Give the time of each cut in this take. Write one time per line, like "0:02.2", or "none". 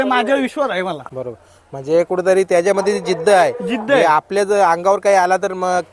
none